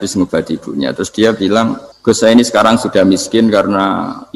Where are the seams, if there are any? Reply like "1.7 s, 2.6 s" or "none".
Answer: 1.9 s